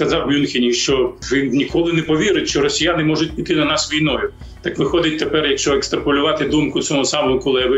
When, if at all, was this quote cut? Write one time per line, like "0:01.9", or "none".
0:01.2